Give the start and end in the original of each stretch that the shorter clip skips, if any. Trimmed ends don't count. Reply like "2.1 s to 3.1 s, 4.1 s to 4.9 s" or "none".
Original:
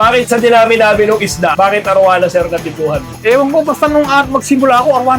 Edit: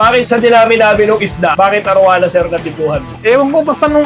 none